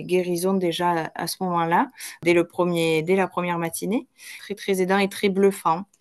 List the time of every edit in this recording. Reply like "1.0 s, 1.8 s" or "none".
2.2 s, 4.4 s